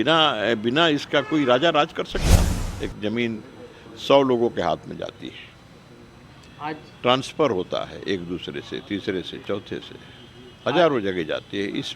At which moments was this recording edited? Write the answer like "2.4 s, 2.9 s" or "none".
2.5 s